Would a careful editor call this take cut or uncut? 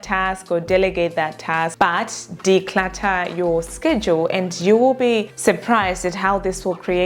uncut